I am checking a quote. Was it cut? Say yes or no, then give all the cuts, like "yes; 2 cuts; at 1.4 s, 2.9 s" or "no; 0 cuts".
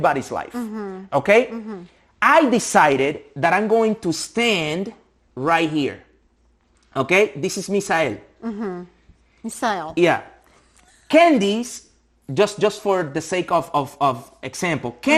no; 0 cuts